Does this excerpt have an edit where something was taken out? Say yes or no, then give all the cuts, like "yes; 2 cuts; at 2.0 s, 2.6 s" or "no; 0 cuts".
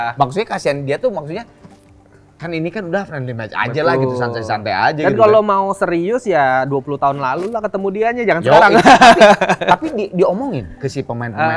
no; 0 cuts